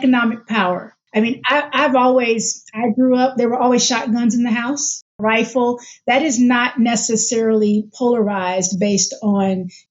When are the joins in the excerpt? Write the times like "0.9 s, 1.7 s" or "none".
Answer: 0.9 s, 5.1 s